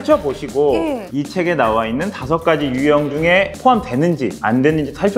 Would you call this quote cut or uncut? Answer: cut